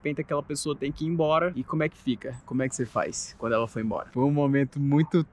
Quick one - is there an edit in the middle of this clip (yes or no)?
yes